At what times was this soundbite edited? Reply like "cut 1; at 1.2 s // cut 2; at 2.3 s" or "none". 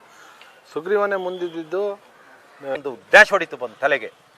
cut 1; at 2.8 s

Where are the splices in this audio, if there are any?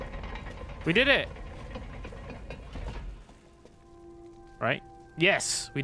none

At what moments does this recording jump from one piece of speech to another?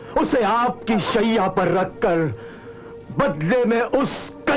none

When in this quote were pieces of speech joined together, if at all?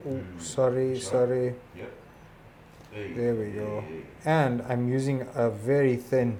none

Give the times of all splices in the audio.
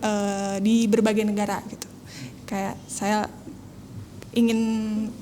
none

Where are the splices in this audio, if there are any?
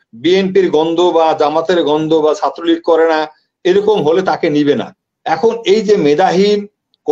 none

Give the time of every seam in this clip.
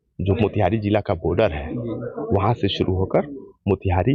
none

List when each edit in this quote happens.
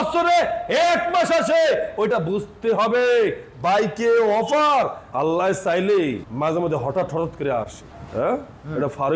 none

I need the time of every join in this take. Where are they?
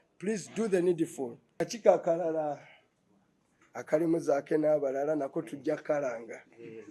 cut 1; at 1.6 s

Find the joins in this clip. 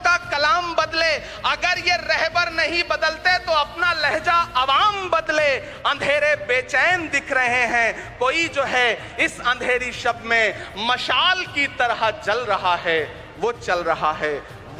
none

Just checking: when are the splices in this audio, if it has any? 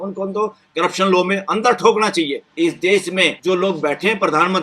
cut 1; at 2.4 s // cut 2; at 3.4 s

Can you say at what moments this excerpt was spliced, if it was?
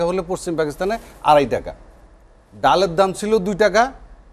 none

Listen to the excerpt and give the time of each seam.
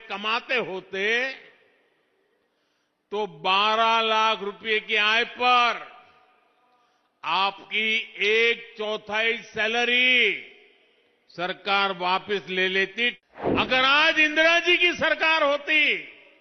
cut 1; at 13.2 s

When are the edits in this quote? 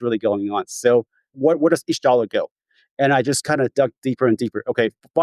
cut 1; at 1.4 s

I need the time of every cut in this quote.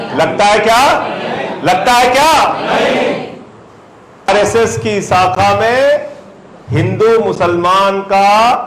cut 1; at 4.3 s

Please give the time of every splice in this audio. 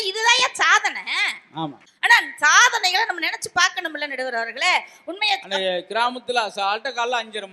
none

